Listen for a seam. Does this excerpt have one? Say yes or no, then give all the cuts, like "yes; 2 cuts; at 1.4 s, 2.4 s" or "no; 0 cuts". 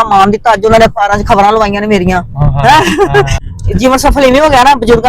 yes; 1 cut; at 3.3 s